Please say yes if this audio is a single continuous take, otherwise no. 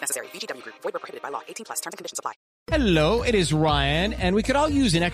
no